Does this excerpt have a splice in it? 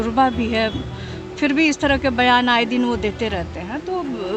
no; 0 cuts

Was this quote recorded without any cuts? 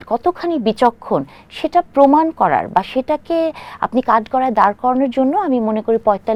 yes; 0 cuts

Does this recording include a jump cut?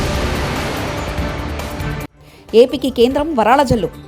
yes; 1 cut; at 2.2 s

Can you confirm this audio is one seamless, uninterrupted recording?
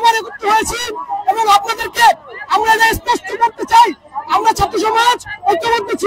yes; 0 cuts

